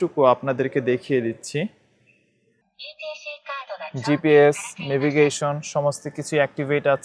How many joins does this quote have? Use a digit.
1